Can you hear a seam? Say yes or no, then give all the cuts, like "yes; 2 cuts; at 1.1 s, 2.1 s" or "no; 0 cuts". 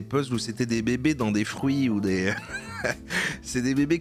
no; 0 cuts